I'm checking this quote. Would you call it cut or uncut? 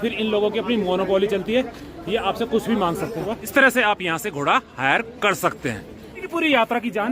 cut